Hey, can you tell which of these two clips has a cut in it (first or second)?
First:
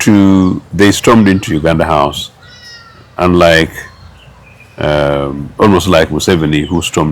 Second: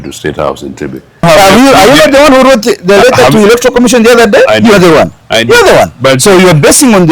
second